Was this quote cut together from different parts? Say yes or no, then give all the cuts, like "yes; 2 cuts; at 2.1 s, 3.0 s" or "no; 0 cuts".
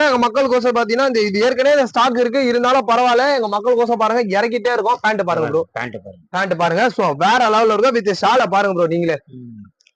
no; 0 cuts